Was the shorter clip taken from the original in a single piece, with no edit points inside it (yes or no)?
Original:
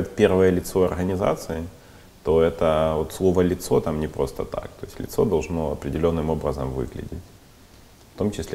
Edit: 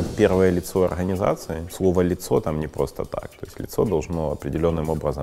no